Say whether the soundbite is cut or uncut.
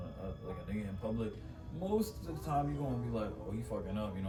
uncut